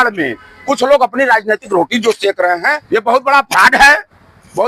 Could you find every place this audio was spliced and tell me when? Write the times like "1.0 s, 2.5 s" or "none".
2.7 s